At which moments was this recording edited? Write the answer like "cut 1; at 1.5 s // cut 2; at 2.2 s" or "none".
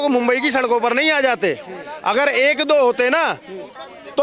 none

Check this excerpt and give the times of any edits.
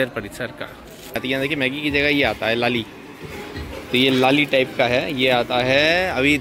cut 1; at 1.2 s

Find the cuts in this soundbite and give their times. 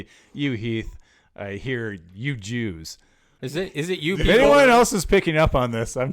cut 1; at 3.4 s

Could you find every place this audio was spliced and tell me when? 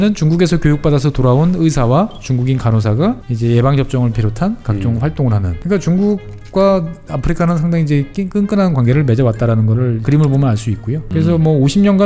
cut 1; at 3.3 s // cut 2; at 5.5 s // cut 3; at 10.0 s // cut 4; at 11.1 s

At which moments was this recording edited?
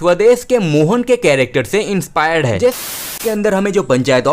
cut 1; at 3.1 s

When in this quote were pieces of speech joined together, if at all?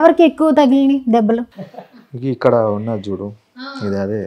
cut 1; at 1.6 s

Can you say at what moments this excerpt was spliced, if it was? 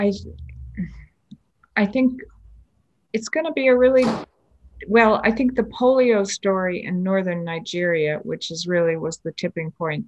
none

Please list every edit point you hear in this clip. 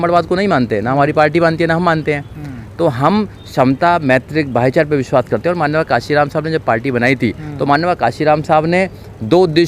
none

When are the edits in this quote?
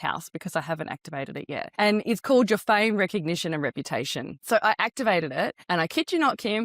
cut 1; at 1.7 s // cut 2; at 4.3 s // cut 3; at 5.6 s

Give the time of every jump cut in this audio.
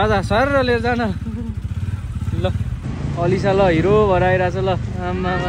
cut 1; at 2.8 s

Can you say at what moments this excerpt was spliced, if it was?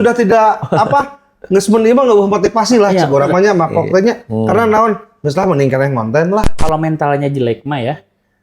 cut 1; at 6.5 s

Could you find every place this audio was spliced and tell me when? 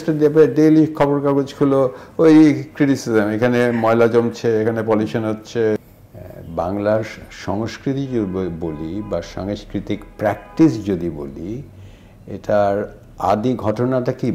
cut 1; at 5.8 s

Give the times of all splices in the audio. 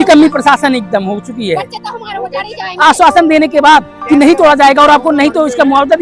cut 1; at 3.9 s

